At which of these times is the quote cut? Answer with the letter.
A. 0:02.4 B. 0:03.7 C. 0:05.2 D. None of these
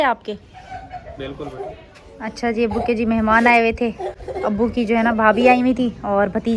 D